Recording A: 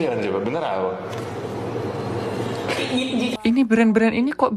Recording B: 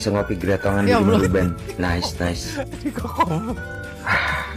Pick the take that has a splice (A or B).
A